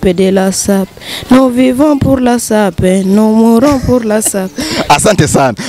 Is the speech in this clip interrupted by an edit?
no; 0 cuts

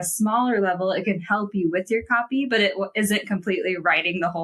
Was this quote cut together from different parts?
no; 0 cuts

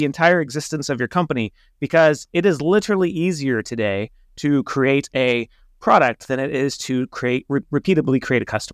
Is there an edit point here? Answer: yes; 1 cut; at 7.7 s

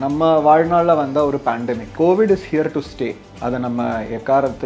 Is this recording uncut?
no; 2 cuts; at 1.8 s, 3.3 s

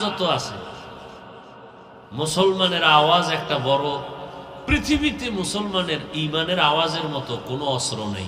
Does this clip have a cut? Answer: yes; 1 cut; at 2.0 s

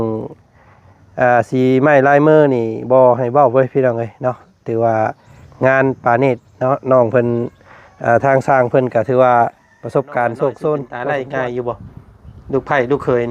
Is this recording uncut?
no; 1 cut; at 10.9 s

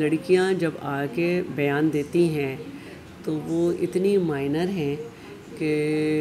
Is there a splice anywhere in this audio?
no; 0 cuts

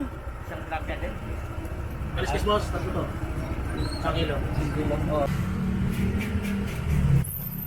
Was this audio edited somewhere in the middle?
yes; 1 cut; at 5.3 s

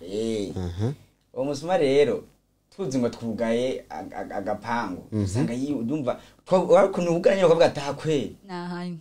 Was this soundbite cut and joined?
no; 0 cuts

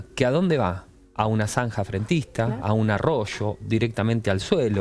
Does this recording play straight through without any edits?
yes; 0 cuts

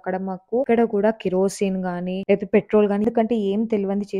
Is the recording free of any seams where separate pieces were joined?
no; 1 cut; at 3.0 s

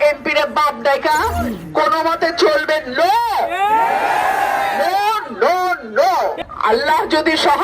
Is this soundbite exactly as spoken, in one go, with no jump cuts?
no; 1 cut; at 6.3 s

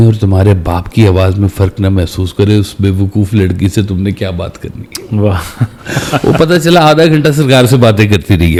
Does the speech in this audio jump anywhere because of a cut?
no; 0 cuts

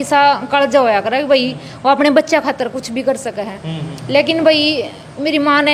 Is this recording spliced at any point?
no; 0 cuts

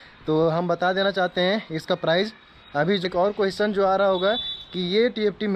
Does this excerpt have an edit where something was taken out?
yes; 1 cut; at 3.0 s

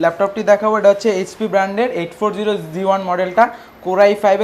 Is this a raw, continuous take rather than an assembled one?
yes; 0 cuts

